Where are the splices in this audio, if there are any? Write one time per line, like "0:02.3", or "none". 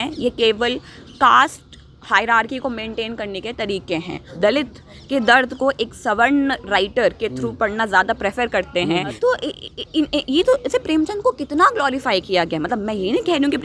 0:04.2
0:09.2